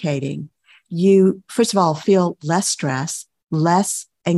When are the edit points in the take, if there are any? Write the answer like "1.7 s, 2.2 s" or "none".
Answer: none